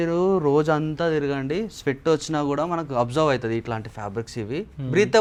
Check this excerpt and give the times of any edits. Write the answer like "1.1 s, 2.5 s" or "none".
none